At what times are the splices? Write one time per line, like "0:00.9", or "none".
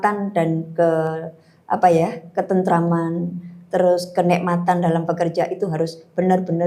none